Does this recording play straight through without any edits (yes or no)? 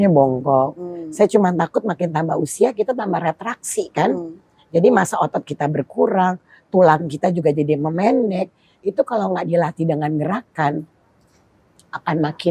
yes